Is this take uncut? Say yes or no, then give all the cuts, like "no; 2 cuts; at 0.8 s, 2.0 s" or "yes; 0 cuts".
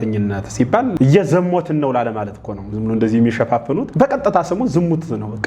no; 2 cuts; at 0.9 s, 3.9 s